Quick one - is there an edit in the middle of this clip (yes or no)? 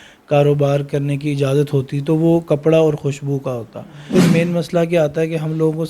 yes